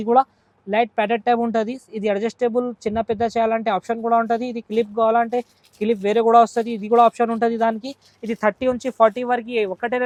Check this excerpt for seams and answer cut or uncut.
uncut